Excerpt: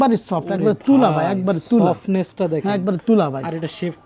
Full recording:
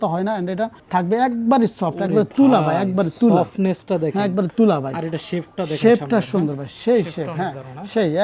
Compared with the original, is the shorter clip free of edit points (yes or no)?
yes